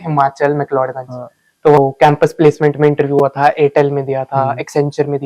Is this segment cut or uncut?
cut